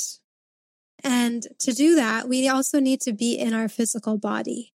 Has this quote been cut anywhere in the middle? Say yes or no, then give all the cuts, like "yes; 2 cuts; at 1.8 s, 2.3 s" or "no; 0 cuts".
no; 0 cuts